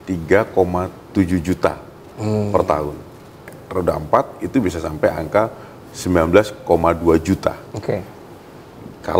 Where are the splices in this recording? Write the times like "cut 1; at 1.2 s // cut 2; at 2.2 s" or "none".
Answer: cut 1; at 3.5 s